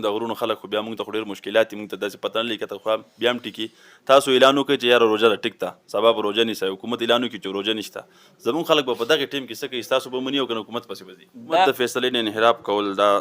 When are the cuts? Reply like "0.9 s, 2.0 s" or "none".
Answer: 11.7 s